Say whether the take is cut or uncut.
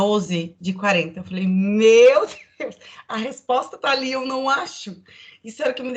uncut